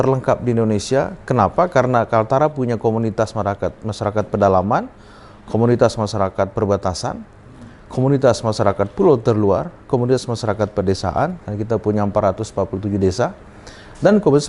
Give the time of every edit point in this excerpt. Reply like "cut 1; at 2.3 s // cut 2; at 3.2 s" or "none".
none